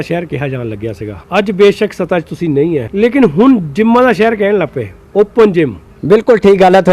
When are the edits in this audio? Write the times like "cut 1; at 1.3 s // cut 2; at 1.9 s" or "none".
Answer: cut 1; at 1.1 s // cut 2; at 2.9 s // cut 3; at 5.9 s